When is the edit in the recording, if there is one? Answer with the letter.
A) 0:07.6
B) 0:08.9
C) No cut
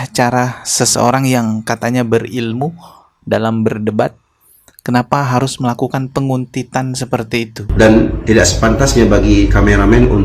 A